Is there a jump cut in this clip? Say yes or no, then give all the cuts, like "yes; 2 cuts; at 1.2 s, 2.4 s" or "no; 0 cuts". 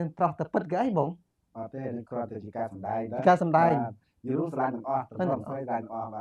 no; 0 cuts